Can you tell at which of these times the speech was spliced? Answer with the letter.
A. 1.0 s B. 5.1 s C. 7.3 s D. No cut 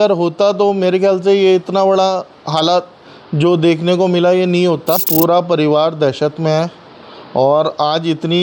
B